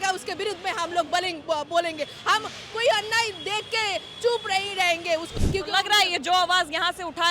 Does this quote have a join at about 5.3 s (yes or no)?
yes